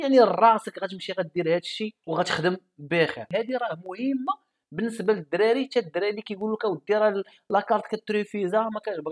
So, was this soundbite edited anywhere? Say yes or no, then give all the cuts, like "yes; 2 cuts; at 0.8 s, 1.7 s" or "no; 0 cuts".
yes; 2 cuts; at 2.0 s, 3.2 s